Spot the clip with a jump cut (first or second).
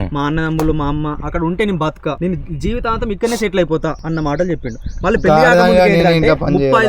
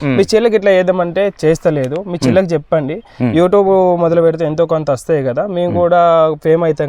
first